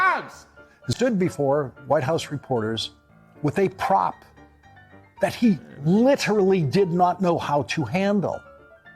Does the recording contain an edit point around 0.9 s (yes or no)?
yes